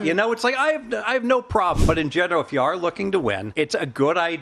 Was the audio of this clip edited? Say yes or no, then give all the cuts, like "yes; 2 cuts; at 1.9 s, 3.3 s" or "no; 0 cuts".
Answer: yes; 2 cuts; at 1.8 s, 3.5 s